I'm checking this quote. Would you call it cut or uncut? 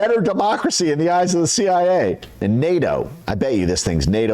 cut